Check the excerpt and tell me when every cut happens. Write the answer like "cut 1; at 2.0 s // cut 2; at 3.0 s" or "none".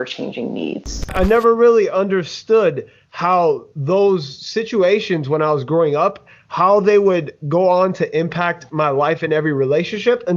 cut 1; at 1.1 s